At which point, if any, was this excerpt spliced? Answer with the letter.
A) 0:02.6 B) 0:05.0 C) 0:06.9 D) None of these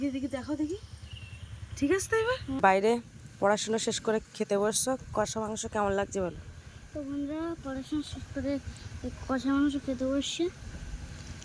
A